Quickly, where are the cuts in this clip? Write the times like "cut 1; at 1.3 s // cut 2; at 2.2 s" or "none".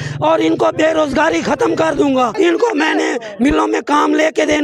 cut 1; at 2.3 s